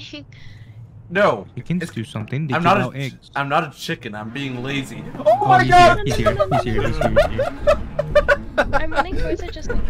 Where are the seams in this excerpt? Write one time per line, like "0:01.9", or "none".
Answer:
none